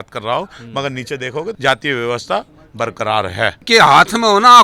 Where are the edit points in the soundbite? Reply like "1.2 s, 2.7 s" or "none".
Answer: 1.6 s, 3.6 s